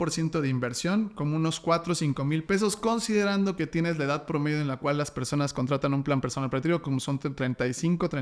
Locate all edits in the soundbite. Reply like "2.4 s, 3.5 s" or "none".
none

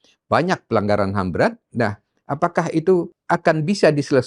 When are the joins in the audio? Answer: 3.2 s

